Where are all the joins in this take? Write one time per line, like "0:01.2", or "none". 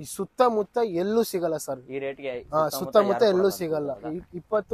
none